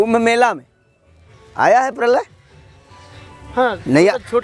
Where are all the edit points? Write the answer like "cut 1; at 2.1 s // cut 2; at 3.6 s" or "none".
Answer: none